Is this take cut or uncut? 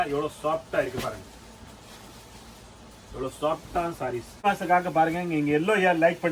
cut